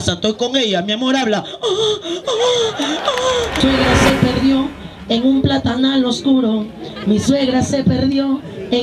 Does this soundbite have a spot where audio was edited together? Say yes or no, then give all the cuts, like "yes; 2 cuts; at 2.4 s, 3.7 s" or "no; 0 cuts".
yes; 1 cut; at 3.6 s